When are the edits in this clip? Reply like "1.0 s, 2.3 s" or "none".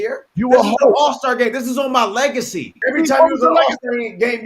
2.7 s